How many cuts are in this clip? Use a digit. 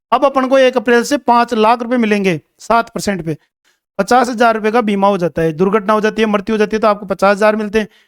1